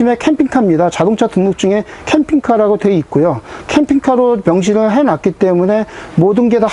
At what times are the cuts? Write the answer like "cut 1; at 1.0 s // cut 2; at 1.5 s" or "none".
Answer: none